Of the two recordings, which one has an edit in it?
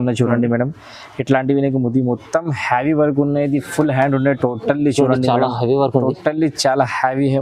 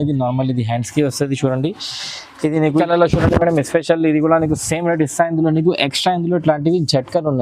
second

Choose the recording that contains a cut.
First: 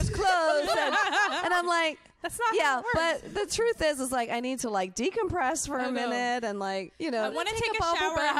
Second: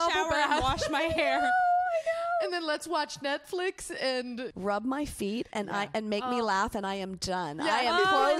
second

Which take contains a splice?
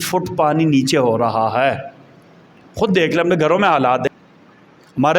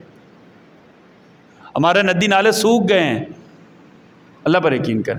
first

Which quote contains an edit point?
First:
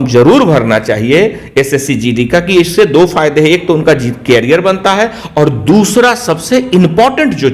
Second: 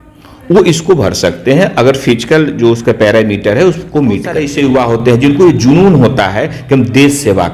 second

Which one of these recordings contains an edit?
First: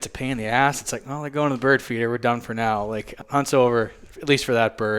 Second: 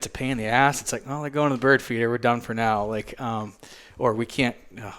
first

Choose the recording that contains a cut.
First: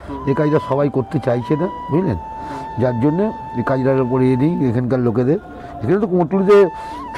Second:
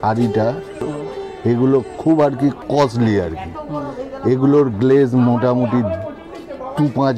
second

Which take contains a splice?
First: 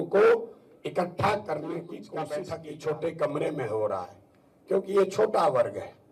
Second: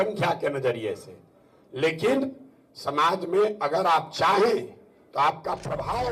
first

